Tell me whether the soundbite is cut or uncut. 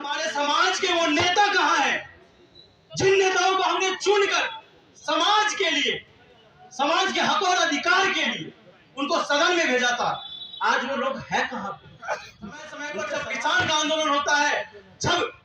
cut